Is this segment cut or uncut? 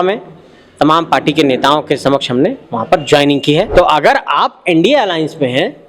cut